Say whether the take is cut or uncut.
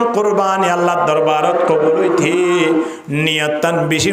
uncut